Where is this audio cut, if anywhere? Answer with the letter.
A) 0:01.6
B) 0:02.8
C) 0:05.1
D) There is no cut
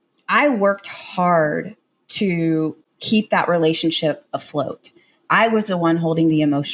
D